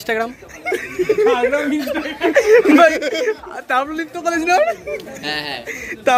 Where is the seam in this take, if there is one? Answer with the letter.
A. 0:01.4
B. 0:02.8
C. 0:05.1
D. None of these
D